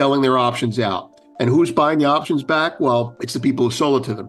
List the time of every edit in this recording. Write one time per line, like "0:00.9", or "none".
0:03.2